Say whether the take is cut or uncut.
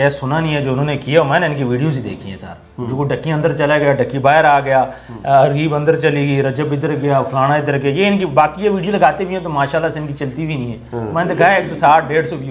uncut